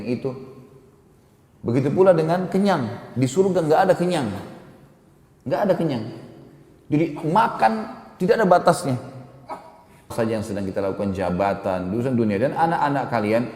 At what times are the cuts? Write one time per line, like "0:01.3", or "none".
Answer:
0:10.1